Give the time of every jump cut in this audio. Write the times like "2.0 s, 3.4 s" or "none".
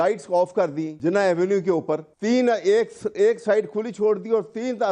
0.9 s, 2.1 s